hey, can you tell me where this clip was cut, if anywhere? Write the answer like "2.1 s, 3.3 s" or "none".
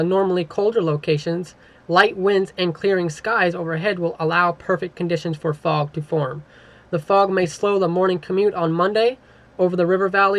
none